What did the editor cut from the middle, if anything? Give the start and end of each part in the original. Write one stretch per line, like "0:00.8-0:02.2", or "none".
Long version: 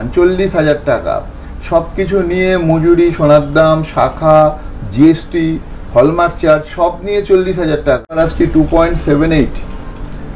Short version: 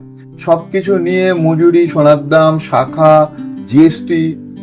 none

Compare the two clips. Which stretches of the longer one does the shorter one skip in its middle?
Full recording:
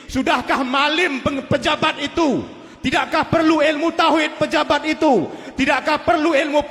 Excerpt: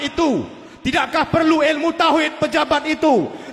none

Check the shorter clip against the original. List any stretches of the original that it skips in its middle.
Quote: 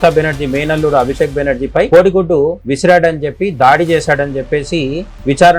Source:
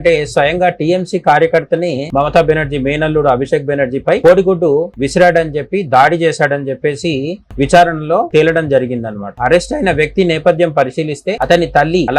none

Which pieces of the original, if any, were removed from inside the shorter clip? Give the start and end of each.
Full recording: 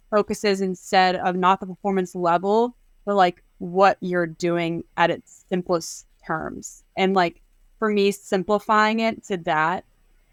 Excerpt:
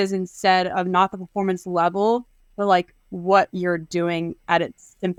none

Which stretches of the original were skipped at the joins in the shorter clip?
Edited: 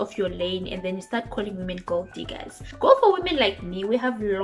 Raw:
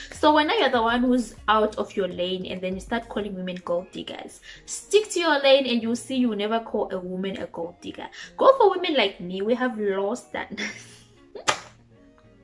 0:04.4-0:08.2

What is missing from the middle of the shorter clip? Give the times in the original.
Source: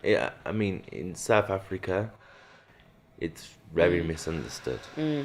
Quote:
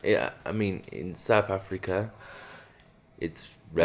none

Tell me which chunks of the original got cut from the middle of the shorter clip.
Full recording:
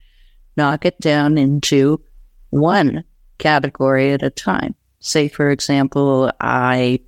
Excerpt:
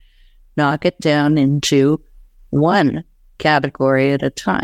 none

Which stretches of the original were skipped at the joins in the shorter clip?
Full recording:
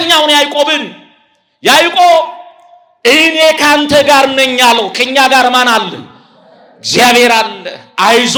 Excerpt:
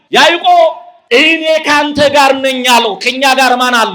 0:02.4-0:02.8

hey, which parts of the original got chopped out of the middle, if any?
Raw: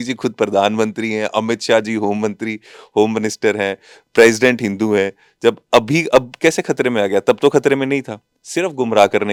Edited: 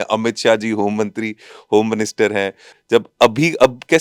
0:04.0-0:05.2

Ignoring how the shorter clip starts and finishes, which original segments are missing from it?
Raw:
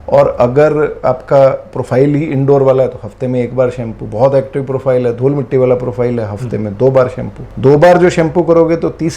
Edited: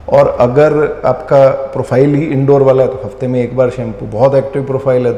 none

